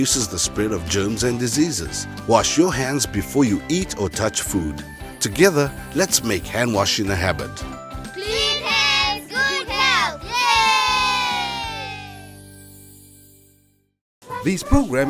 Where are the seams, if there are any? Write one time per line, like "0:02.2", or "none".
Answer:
0:14.2